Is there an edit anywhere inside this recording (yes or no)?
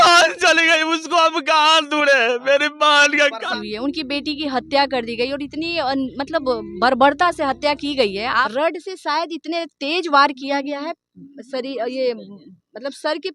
yes